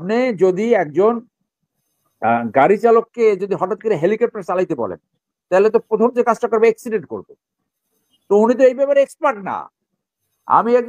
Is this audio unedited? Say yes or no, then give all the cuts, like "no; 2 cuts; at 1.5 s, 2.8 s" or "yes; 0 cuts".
yes; 0 cuts